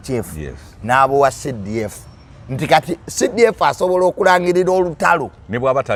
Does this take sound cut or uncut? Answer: uncut